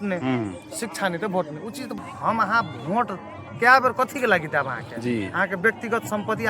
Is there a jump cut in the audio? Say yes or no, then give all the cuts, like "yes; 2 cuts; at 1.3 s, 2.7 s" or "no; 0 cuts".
yes; 1 cut; at 1.9 s